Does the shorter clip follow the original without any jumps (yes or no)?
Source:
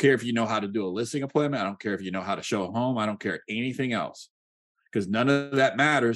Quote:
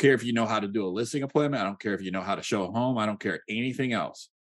yes